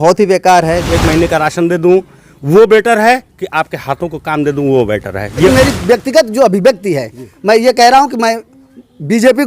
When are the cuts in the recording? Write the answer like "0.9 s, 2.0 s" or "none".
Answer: 0.8 s, 5.5 s